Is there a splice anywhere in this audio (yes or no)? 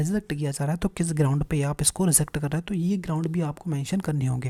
no